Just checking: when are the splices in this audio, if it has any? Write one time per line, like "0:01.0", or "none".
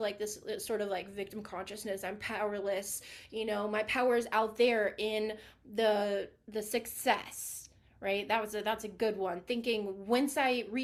none